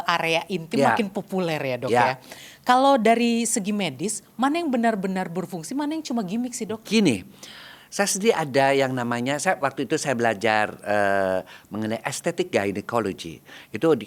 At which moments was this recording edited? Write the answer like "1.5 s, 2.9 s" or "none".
none